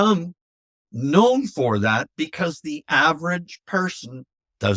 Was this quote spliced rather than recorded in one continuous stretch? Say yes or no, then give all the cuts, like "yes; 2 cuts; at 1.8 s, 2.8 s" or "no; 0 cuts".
no; 0 cuts